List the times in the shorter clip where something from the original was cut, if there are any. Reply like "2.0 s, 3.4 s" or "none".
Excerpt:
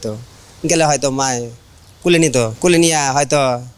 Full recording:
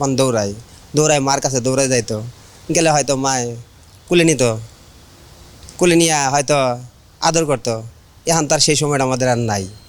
2.5 s

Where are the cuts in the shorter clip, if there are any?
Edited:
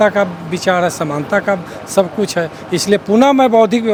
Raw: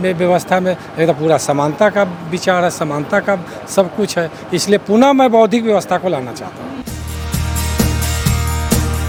none

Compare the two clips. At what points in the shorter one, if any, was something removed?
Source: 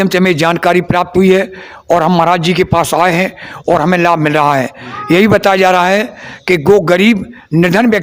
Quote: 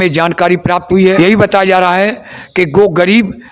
1.2 s

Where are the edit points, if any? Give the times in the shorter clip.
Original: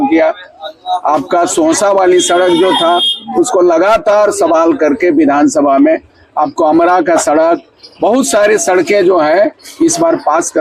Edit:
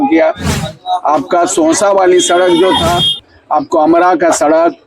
3.3 s

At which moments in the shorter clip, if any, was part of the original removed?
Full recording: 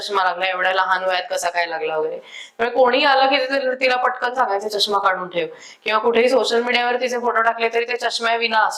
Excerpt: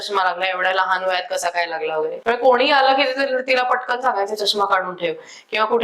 2.2 s

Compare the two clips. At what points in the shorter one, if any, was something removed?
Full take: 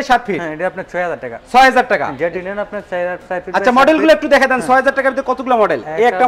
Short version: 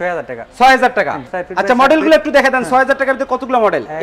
1.2 s

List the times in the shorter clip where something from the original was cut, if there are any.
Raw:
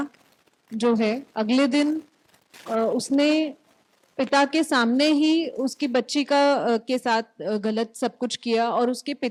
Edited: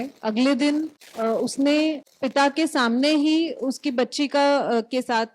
1.0 s, 2.1 s

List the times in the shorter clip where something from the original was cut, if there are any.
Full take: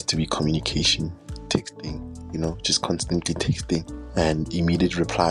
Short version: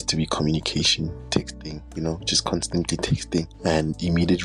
1.4 s, 3.5 s

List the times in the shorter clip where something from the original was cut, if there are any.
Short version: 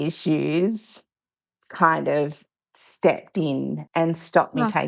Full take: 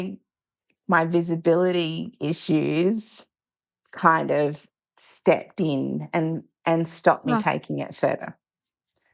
3.8 s

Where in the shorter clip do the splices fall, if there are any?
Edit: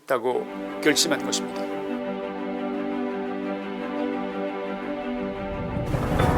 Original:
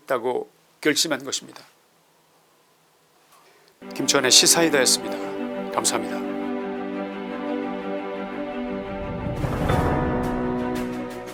1.4 s

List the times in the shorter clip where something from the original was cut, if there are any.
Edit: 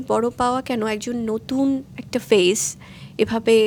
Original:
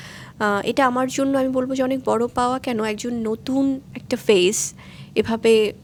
none

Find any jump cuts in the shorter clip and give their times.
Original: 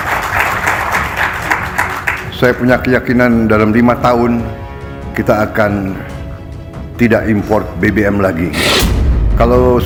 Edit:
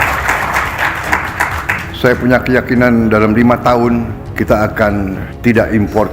4.2 s, 5.3 s

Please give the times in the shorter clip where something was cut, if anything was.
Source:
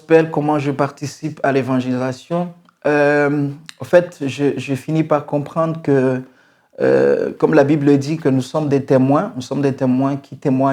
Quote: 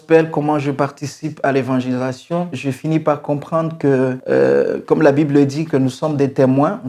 2.6 s, 4.2 s

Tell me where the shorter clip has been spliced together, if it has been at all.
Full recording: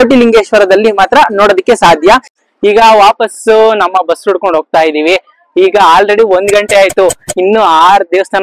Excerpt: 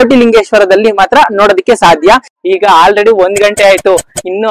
2.3 s

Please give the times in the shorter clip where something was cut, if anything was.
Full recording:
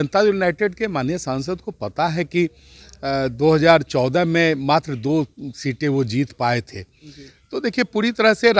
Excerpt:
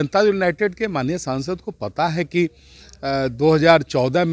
none

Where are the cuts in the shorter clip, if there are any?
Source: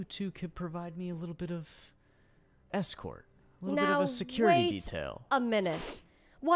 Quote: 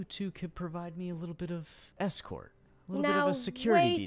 1.8 s

